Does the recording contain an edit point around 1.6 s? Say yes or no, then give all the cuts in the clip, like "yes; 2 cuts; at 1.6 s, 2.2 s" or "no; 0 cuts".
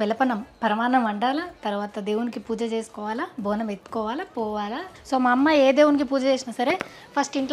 no; 1 cut; at 4.9 s